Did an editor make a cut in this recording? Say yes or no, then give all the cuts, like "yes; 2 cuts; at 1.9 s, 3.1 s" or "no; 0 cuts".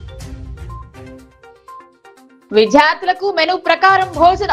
yes; 2 cuts; at 1.0 s, 2.3 s